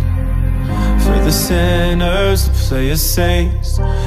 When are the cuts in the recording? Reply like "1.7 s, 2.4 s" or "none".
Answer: none